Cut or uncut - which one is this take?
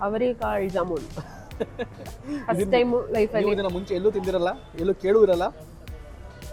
uncut